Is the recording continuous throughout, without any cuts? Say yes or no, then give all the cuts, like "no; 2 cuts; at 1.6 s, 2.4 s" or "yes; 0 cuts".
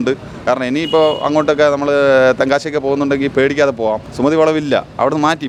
yes; 0 cuts